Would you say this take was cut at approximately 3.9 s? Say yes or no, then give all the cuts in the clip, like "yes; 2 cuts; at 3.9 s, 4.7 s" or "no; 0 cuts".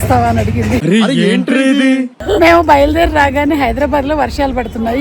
no; 2 cuts; at 0.8 s, 2.2 s